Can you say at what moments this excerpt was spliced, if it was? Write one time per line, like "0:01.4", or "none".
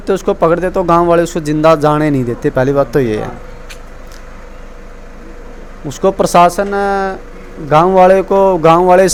none